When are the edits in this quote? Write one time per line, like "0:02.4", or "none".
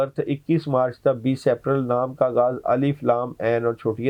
none

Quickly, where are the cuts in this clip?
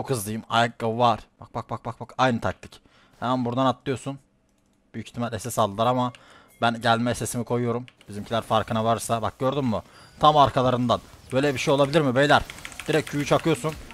0:01.4

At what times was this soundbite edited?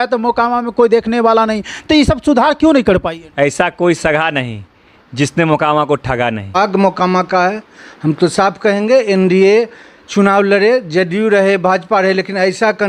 0:03.2
0:06.6

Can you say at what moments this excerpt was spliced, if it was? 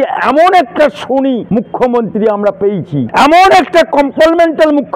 0:01.4
0:03.1

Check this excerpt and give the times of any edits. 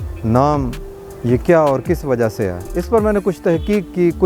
0:02.6

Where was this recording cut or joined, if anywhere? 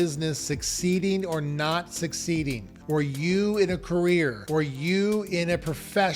none

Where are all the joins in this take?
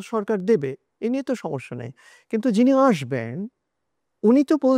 none

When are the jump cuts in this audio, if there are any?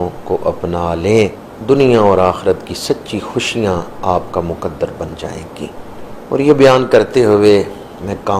0:01.5
0:06.1

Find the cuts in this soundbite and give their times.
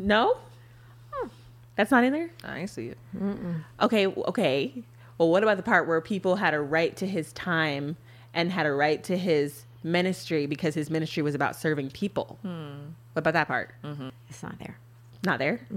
0:14.2

